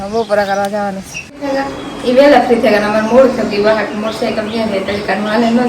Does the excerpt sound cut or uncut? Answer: cut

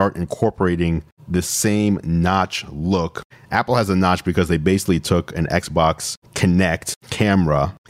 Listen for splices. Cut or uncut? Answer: cut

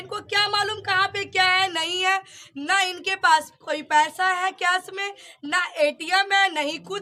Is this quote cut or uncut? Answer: uncut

